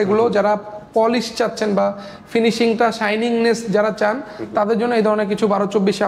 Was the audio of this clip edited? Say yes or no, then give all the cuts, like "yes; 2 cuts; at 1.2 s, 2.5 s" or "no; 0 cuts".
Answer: no; 0 cuts